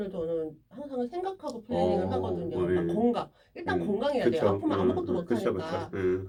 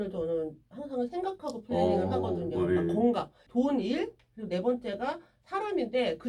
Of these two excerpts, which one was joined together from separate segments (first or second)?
second